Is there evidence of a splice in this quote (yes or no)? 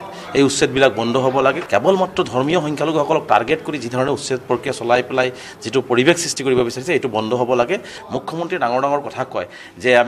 yes